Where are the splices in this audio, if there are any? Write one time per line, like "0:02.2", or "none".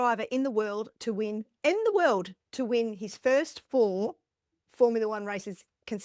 none